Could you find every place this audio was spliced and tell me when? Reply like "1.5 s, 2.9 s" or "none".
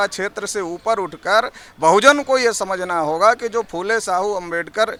none